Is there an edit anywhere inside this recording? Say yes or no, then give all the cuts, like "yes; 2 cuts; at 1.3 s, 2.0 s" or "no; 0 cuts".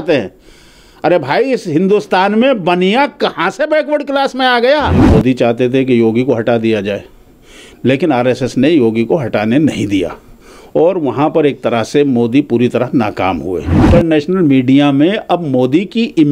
yes; 2 cuts; at 5.0 s, 13.9 s